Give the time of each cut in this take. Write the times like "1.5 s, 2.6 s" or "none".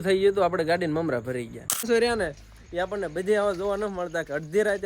1.9 s